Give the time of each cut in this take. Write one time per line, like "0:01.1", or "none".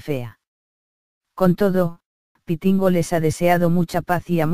none